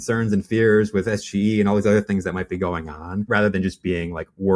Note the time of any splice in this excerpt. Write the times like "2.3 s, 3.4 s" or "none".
none